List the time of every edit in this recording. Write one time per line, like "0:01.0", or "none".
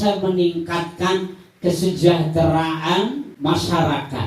0:03.3

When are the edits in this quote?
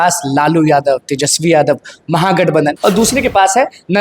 0:02.8

